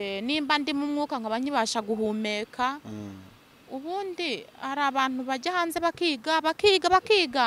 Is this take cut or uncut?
uncut